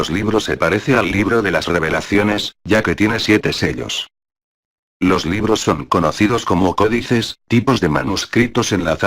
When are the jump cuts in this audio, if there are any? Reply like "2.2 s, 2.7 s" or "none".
5.5 s

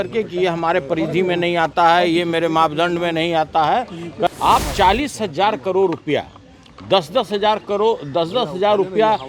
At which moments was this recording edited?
4.3 s

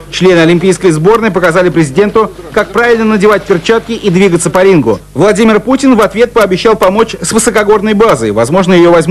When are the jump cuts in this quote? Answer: 6.9 s

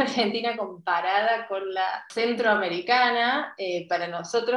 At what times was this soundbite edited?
2.1 s

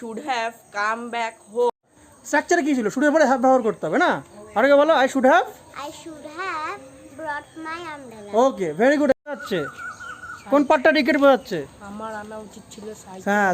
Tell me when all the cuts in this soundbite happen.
1.9 s, 9.5 s

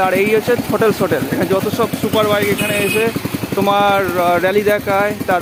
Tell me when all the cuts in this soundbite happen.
none

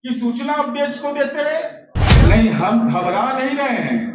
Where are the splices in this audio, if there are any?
2.2 s

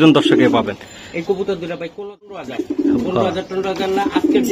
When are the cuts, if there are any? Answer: 2.4 s

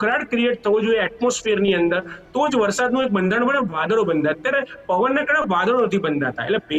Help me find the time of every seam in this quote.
none

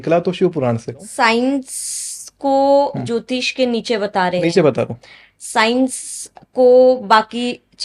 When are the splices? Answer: 1.1 s

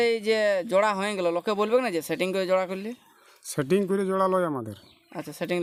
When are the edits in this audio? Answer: none

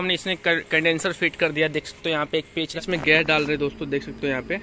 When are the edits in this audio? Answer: 2.8 s

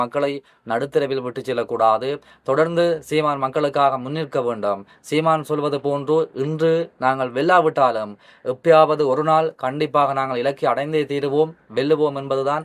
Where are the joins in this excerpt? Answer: none

